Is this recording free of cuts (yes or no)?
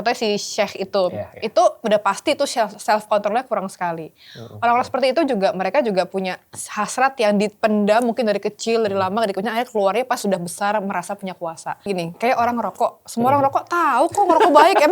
no